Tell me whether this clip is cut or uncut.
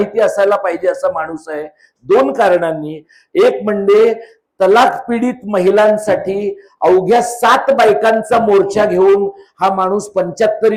uncut